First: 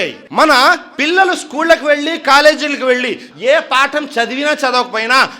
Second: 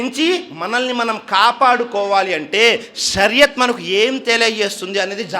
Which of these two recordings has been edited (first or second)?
first